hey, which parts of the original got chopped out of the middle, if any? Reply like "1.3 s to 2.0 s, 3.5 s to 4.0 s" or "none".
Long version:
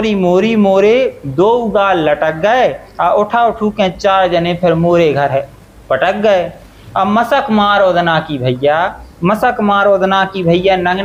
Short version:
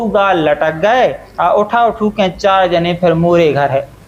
none